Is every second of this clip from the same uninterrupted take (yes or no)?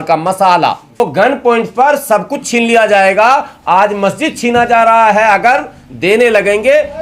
no